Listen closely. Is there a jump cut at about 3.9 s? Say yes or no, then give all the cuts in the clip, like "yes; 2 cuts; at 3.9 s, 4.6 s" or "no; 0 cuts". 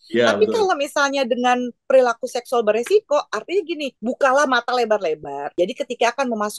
yes; 2 cuts; at 3.9 s, 5.4 s